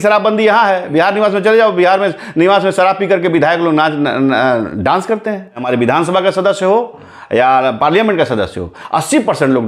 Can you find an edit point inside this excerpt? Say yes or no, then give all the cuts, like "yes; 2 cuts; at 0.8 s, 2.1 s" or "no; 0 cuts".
yes; 1 cut; at 5.6 s